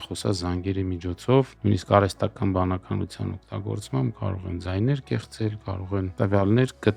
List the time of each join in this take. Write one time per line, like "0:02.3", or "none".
0:01.5
0:06.1